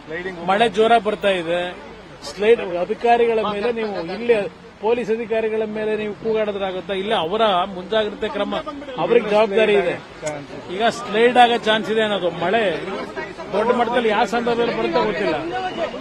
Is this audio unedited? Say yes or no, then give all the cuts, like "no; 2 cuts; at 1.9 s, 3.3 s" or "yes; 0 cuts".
yes; 0 cuts